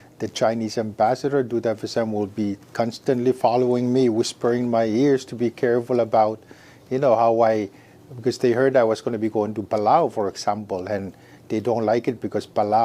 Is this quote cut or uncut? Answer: uncut